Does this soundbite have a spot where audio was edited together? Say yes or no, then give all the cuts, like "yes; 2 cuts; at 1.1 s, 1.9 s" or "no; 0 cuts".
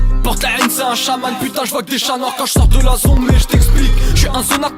no; 0 cuts